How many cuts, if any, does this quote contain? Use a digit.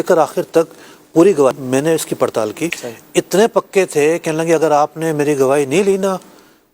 2